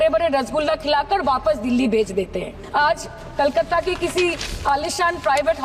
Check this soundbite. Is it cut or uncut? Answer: cut